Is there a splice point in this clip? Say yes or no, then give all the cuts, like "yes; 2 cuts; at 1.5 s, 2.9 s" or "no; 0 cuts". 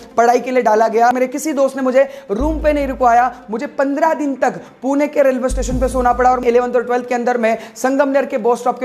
yes; 2 cuts; at 1.1 s, 6.4 s